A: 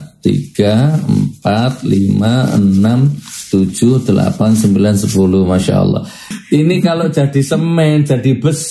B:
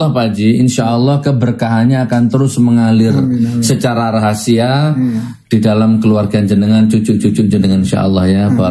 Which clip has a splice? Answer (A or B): A